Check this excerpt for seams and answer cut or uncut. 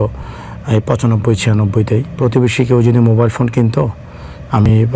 cut